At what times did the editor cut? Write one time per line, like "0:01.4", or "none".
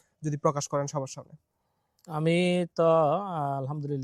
none